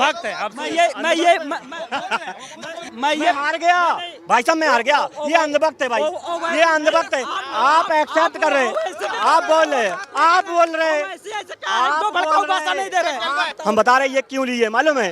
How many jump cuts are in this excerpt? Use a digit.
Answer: 2